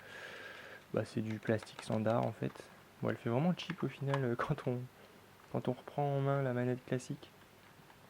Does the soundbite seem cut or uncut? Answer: cut